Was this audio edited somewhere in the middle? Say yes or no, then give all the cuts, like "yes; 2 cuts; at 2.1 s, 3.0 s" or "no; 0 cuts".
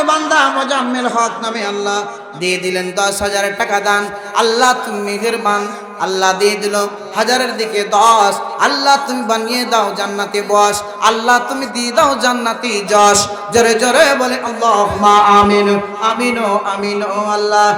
no; 0 cuts